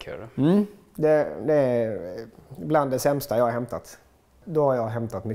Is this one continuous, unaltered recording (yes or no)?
no